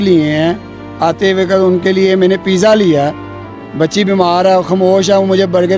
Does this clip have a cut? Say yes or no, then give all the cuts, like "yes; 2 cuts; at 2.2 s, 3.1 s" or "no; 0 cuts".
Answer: no; 0 cuts